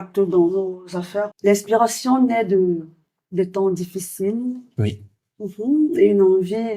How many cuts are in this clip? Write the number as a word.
one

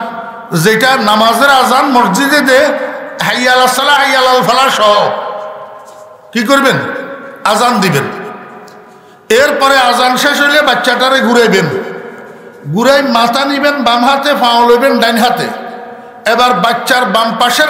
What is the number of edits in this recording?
zero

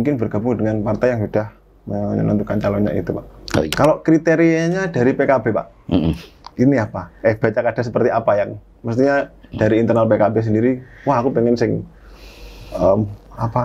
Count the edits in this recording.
one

